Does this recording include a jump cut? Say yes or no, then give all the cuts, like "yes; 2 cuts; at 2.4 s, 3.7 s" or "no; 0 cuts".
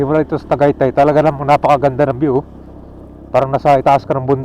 no; 0 cuts